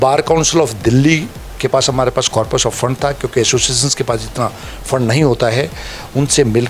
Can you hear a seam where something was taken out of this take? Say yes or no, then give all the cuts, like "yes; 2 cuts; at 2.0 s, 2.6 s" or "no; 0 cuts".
no; 0 cuts